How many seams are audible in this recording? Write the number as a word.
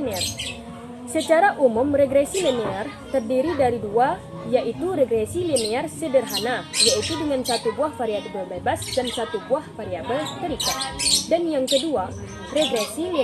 zero